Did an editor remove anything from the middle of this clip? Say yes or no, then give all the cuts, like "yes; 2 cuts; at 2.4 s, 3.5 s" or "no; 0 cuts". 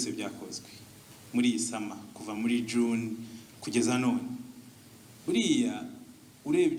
no; 0 cuts